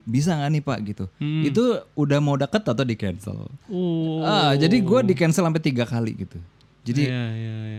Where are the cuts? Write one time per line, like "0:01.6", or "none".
none